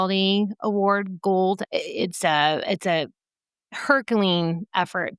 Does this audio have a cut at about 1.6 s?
yes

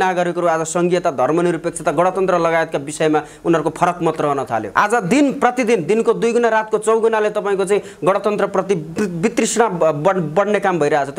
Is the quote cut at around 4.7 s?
yes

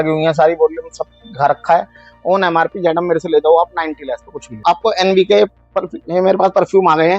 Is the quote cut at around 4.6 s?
yes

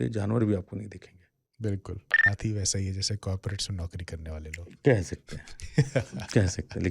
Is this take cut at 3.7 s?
no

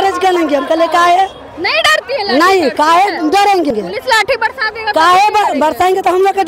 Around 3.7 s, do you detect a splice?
yes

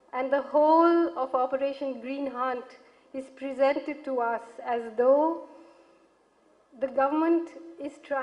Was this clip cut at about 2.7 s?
no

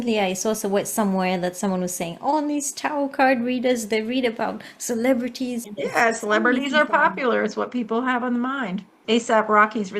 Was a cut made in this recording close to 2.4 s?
no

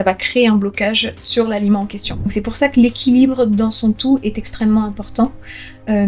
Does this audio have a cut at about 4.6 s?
no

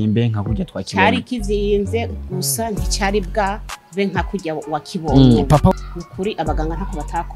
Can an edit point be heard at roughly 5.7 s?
yes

